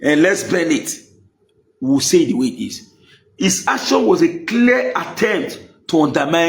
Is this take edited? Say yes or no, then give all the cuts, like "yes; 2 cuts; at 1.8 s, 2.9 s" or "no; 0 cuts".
no; 0 cuts